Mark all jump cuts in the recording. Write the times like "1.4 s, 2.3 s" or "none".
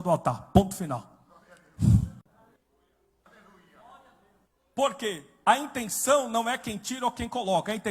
2.3 s